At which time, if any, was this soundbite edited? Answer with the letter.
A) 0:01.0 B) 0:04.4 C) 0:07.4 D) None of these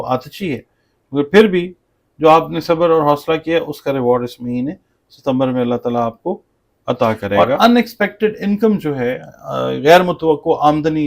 C